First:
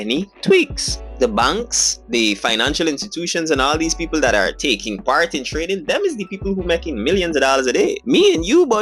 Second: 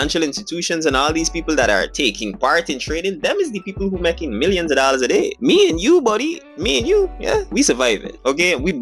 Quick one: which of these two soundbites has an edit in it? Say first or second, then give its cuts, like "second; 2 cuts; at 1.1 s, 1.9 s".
first; 1 cut; at 0.9 s